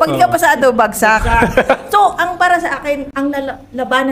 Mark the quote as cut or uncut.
uncut